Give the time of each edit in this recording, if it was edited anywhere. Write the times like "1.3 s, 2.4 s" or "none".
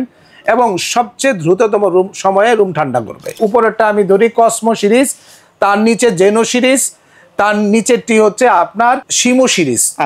3.4 s, 9.1 s

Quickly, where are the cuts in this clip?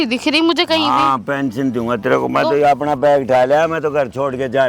none

